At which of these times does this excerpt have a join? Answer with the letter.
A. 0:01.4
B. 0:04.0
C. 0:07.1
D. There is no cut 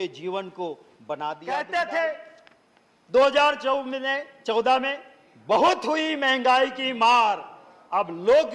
A